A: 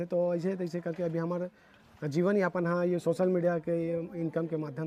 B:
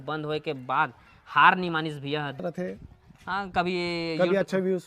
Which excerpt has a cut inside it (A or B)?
B